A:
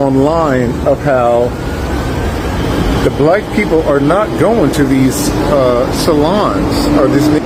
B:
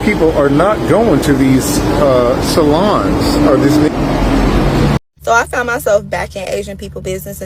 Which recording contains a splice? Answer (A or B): B